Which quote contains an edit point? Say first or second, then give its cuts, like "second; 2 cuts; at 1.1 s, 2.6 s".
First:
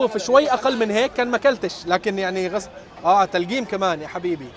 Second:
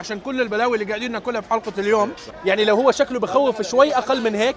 second; 1 cut; at 2.3 s